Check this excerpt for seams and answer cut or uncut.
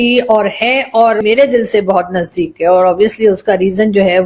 cut